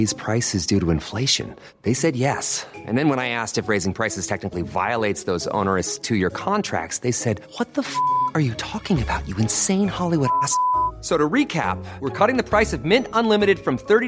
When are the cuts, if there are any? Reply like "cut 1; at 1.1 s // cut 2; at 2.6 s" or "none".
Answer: none